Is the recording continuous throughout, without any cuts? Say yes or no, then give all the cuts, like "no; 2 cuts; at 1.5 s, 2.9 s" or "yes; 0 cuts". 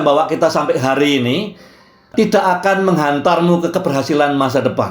no; 1 cut; at 2.1 s